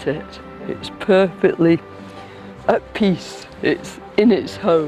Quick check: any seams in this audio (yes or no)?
no